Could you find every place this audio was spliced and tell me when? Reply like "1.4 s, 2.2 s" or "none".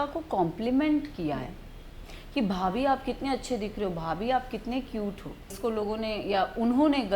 5.6 s